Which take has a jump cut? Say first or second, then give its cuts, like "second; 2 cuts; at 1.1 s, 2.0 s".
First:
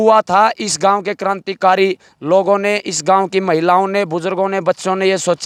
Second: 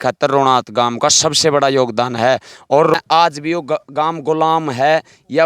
second; 1 cut; at 2.9 s